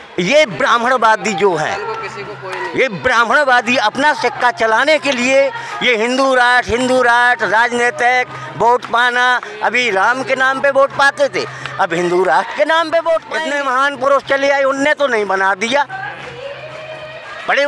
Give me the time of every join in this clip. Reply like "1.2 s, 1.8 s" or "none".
13.4 s

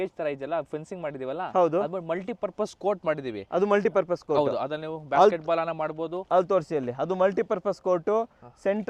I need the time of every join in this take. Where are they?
none

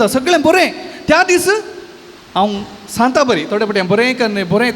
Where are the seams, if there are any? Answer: none

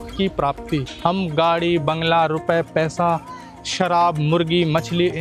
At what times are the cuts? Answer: 0.9 s

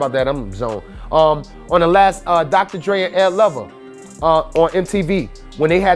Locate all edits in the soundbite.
none

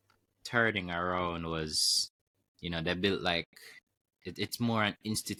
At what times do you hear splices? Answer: none

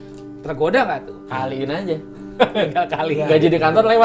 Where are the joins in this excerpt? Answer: none

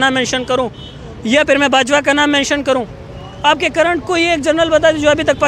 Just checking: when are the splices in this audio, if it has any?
none

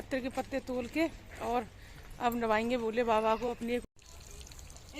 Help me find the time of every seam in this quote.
3.7 s

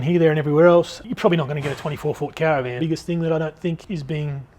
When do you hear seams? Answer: 1.0 s, 2.8 s, 3.8 s

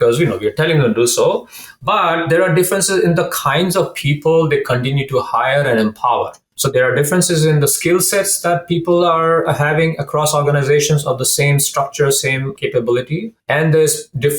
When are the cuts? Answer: 6.5 s, 12.5 s, 13.3 s

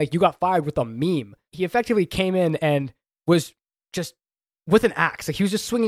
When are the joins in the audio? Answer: 1.4 s

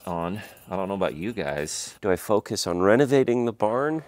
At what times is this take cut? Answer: 2.0 s

